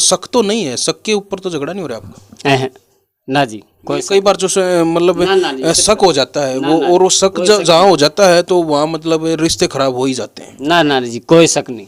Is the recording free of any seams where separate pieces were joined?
yes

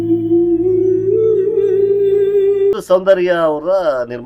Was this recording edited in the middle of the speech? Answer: yes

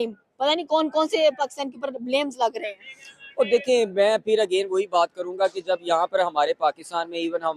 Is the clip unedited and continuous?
yes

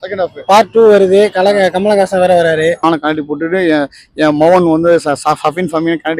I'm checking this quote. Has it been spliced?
yes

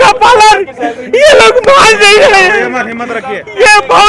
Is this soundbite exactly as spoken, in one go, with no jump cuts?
yes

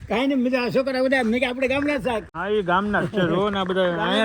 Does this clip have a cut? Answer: yes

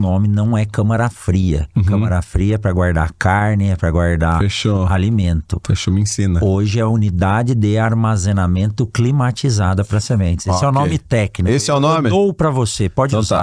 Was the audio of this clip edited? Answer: no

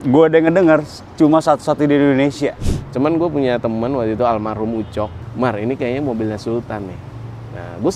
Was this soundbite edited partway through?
yes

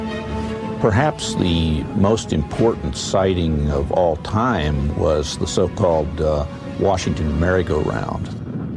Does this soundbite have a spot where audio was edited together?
no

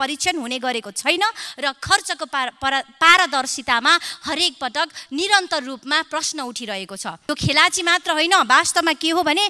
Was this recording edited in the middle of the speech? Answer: yes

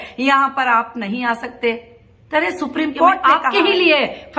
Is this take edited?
yes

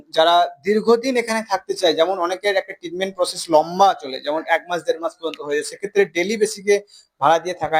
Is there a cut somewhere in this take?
no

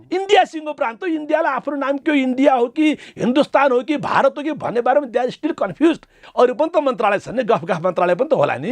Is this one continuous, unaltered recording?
no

